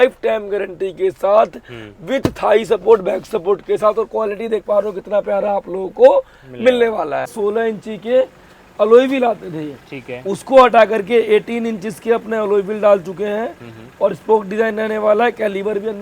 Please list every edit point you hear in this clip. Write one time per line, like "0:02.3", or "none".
0:07.3